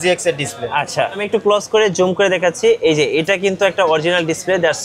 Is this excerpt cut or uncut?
cut